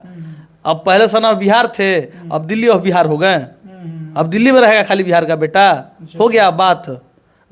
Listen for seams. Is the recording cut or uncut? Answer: uncut